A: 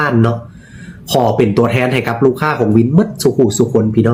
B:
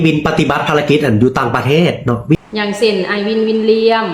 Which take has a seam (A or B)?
B